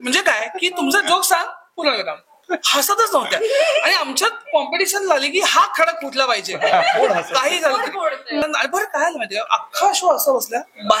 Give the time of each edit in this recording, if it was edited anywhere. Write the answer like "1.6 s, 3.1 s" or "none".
8.4 s